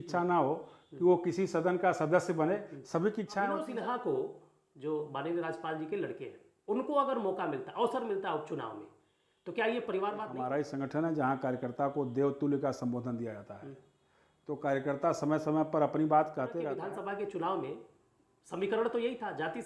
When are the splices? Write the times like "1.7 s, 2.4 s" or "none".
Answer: 3.7 s, 10.4 s, 16.5 s